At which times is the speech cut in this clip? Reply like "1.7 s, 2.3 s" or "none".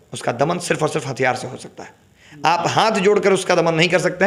none